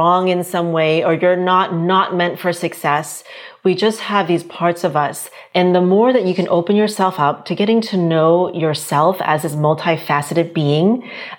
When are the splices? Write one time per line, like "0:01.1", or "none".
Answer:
0:05.3